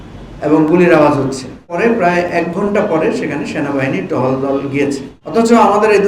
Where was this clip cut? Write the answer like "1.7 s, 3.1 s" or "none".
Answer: 1.7 s, 5.1 s